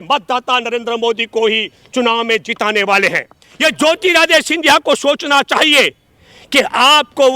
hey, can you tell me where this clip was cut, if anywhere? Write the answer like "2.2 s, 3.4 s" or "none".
3.4 s